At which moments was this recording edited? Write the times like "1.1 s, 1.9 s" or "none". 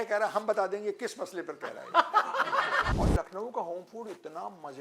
2.9 s